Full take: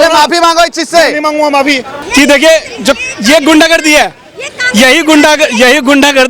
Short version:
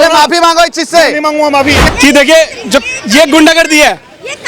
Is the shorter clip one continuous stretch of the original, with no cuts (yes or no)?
no